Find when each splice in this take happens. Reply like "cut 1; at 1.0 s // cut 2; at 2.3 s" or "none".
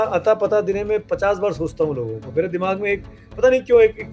none